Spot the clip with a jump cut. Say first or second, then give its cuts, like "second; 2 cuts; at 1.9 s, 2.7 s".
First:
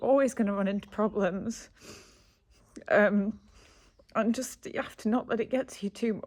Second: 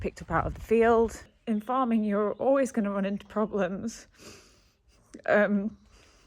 second; 1 cut; at 1.3 s